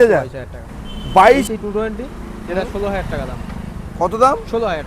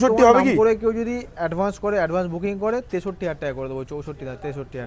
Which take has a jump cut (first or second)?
first